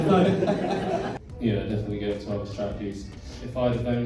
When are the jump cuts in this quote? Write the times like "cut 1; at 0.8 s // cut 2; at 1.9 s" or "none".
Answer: cut 1; at 1.1 s // cut 2; at 3.1 s